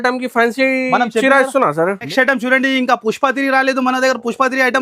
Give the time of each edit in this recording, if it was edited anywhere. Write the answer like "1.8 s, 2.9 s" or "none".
2.0 s